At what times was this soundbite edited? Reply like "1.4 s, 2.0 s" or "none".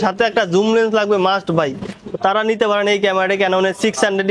none